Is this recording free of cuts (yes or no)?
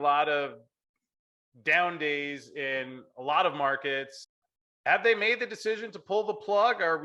no